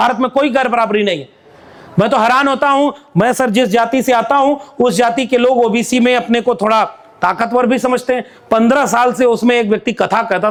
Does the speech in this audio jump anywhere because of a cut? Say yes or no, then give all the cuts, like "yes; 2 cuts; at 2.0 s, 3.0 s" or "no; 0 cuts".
no; 0 cuts